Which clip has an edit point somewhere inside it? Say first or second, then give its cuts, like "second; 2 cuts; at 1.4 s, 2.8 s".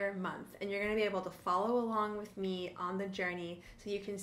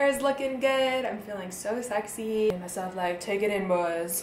second; 1 cut; at 2.5 s